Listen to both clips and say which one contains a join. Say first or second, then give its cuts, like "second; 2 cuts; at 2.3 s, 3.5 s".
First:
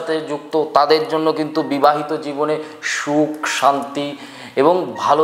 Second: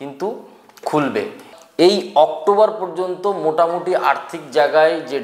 second; 1 cut; at 1.4 s